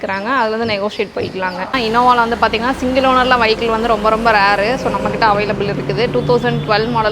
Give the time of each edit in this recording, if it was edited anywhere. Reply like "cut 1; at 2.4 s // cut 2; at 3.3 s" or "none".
cut 1; at 1.8 s